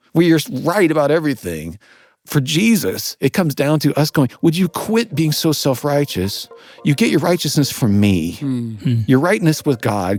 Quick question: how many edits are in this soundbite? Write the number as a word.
zero